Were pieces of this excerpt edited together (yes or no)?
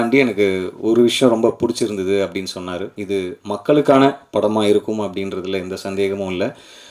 yes